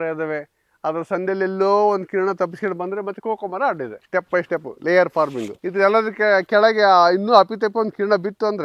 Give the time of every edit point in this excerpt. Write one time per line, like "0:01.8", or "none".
0:04.0